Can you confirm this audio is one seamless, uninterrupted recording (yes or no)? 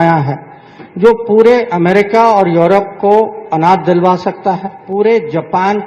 no